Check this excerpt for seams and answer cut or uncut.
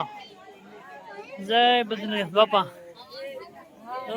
uncut